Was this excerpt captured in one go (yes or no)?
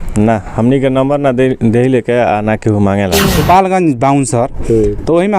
no